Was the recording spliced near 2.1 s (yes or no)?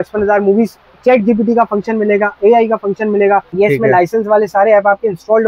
no